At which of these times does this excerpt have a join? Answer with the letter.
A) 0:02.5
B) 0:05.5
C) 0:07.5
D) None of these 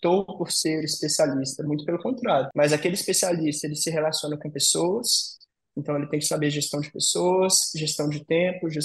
A